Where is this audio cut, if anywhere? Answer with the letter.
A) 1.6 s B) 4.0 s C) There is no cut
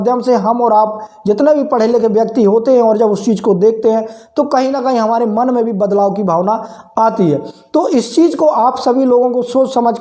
C